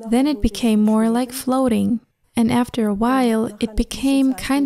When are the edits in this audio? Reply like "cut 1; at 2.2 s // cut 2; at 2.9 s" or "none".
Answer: none